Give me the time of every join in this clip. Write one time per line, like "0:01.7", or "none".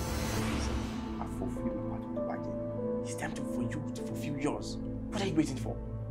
none